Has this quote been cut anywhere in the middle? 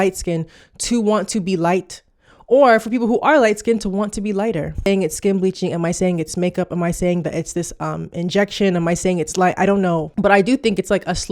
yes; 2 cuts; at 4.9 s, 10.1 s

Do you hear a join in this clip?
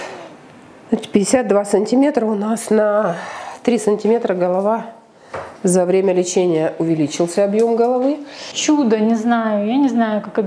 yes; 1 cut; at 8.5 s

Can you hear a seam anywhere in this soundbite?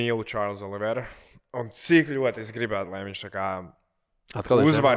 no; 0 cuts

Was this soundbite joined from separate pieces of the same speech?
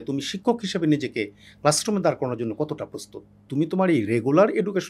yes; 1 cut; at 3.4 s

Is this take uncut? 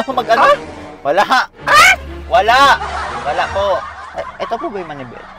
no; 1 cut; at 4.0 s

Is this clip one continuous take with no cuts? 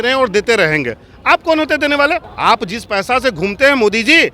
no; 1 cut; at 2.3 s

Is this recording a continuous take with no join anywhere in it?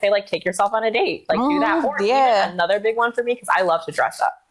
yes; 0 cuts

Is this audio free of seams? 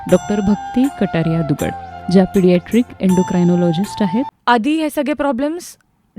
no; 1 cut; at 4.3 s

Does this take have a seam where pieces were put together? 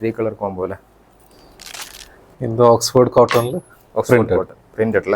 yes; 1 cut; at 1.9 s

